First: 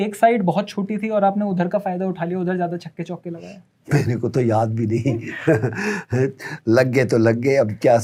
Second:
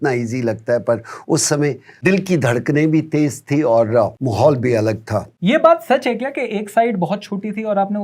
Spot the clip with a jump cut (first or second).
second